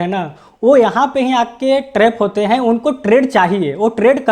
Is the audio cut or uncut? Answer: uncut